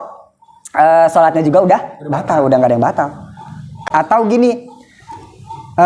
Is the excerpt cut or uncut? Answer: cut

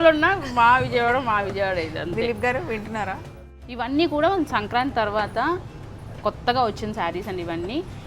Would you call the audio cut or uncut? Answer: cut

